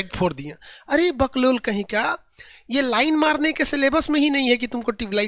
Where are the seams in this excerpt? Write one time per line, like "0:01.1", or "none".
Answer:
none